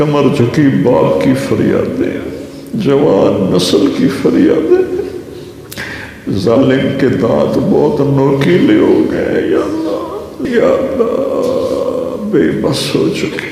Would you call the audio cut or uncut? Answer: cut